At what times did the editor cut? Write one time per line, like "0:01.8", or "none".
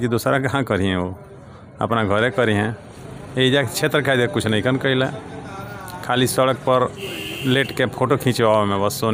none